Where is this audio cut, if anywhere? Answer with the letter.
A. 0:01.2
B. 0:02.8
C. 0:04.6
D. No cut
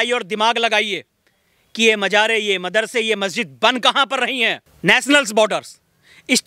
C